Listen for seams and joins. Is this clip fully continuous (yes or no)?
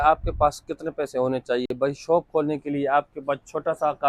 yes